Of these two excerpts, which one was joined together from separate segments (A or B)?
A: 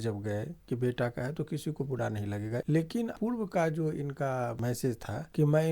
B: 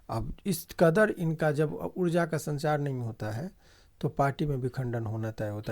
A